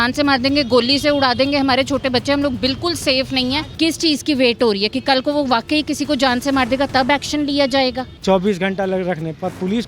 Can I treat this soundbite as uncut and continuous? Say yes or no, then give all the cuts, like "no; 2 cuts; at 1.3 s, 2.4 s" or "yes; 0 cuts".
no; 2 cuts; at 3.7 s, 8.1 s